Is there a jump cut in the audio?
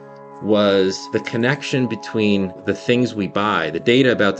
yes; 2 cuts; at 1.0 s, 2.6 s

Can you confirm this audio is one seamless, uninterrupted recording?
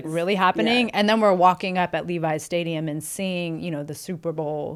yes; 0 cuts

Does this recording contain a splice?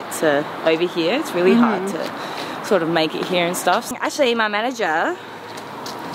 yes; 1 cut; at 3.9 s

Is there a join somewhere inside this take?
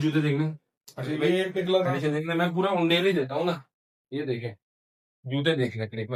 no; 0 cuts

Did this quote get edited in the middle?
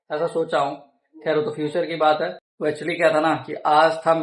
yes; 1 cut; at 2.4 s

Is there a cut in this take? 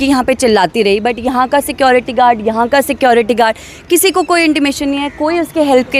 no; 0 cuts

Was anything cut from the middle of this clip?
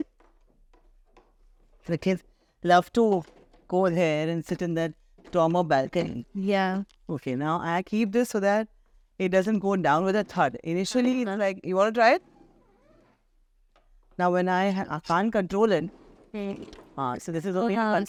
no; 0 cuts

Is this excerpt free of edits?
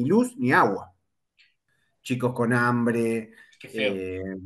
no; 1 cut; at 1.7 s

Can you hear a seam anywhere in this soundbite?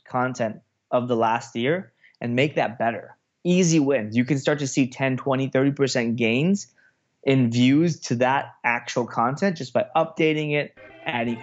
no; 0 cuts

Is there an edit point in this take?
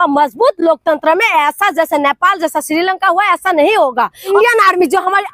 yes; 1 cut; at 4.3 s

